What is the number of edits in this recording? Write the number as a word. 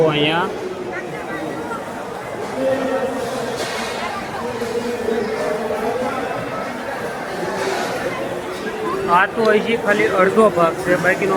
zero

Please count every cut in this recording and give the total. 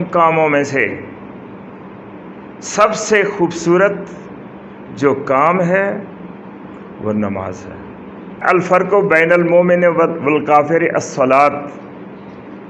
one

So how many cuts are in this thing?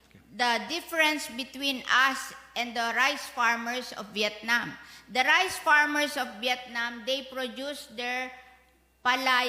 zero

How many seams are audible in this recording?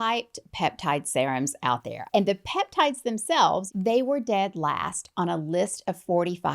two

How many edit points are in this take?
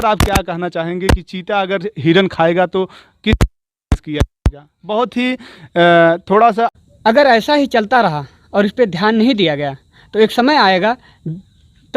one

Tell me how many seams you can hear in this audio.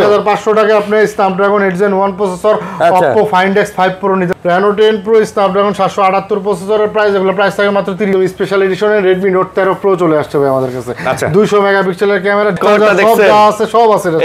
three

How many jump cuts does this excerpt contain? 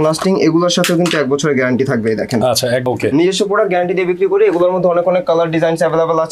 one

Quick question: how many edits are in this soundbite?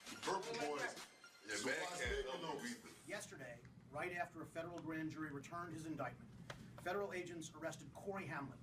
one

